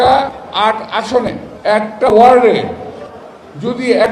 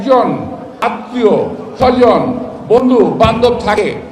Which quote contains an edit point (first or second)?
first